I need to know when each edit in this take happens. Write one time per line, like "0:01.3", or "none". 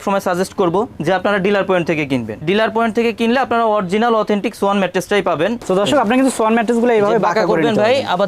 0:02.3
0:05.6